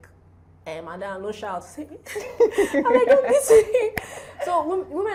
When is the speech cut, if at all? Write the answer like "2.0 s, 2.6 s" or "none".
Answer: none